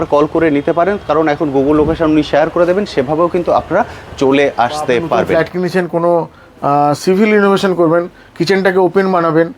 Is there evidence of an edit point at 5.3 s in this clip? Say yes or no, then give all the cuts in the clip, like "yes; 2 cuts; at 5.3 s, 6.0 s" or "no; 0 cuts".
yes; 1 cut; at 5.3 s